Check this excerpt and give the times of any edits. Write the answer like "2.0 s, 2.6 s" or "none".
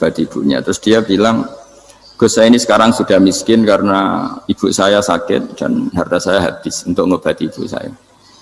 none